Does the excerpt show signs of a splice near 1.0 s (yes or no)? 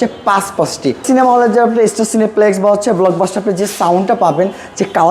yes